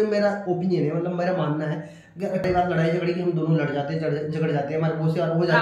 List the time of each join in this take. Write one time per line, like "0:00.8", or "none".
0:02.4